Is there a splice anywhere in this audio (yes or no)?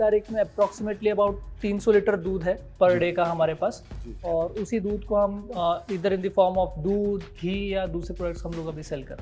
no